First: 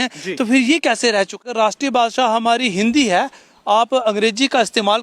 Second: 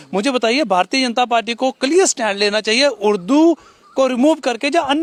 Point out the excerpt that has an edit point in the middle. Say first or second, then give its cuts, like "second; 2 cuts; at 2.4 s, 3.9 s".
first; 1 cut; at 1.4 s